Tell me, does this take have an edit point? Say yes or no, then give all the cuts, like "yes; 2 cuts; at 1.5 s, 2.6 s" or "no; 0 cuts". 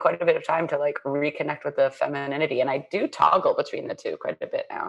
no; 0 cuts